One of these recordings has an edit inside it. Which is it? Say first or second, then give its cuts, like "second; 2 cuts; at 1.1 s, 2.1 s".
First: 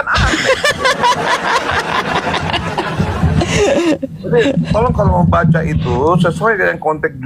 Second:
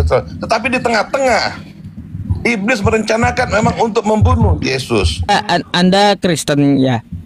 second; 1 cut; at 5.3 s